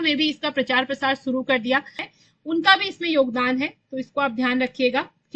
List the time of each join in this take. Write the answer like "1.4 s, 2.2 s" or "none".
2.1 s